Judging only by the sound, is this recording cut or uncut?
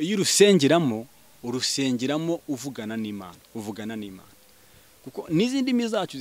uncut